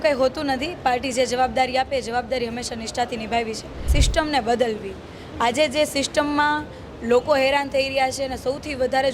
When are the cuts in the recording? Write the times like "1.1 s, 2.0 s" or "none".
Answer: 3.9 s